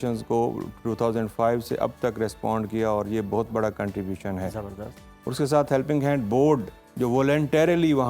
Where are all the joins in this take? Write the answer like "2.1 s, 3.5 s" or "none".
none